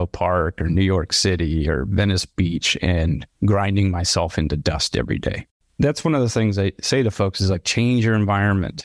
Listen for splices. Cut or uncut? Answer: uncut